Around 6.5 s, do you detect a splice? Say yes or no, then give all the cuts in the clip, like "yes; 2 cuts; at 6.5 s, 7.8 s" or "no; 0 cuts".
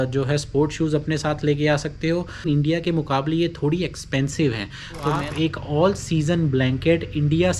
no; 2 cuts; at 2.5 s, 5.2 s